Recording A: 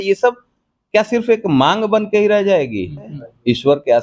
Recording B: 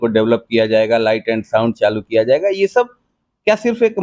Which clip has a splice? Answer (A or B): A